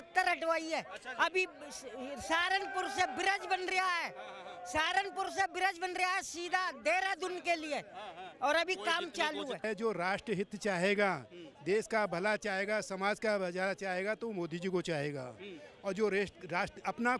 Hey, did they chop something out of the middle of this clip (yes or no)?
yes